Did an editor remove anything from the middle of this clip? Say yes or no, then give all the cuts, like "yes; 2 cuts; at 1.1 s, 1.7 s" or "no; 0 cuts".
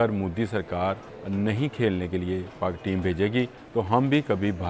yes; 2 cuts; at 1.1 s, 3.6 s